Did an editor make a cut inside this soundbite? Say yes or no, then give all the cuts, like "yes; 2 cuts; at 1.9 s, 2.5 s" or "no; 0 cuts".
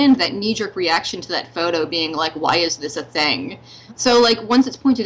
yes; 1 cut; at 4.0 s